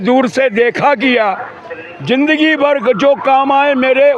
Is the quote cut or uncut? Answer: uncut